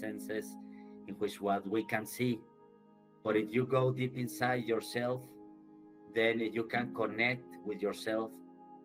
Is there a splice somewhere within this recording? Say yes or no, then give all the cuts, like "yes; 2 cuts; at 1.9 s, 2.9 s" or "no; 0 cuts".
no; 0 cuts